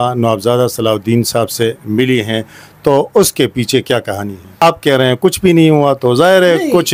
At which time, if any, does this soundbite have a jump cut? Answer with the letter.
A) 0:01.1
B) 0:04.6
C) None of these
B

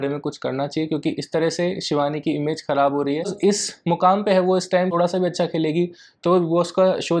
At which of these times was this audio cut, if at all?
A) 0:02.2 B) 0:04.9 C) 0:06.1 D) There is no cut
B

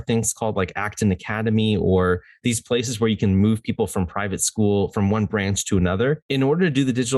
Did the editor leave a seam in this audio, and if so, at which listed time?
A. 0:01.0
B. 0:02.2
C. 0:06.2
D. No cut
C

